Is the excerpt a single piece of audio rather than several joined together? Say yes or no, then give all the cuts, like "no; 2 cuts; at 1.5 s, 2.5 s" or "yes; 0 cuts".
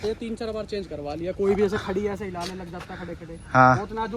yes; 0 cuts